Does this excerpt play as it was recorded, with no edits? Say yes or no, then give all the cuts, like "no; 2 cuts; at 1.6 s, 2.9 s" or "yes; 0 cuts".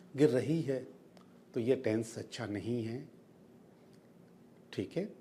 yes; 0 cuts